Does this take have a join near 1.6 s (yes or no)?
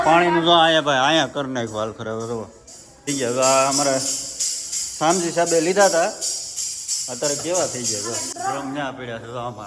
no